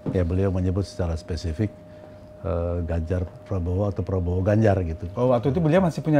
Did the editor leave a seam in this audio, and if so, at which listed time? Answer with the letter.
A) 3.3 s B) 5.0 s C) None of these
C